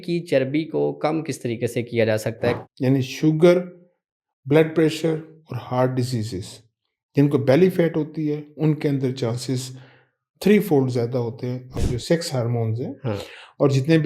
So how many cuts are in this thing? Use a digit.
2